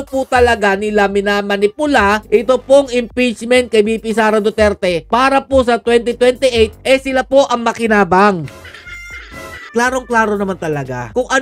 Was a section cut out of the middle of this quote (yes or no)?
no